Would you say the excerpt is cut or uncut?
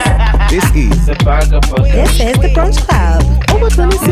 uncut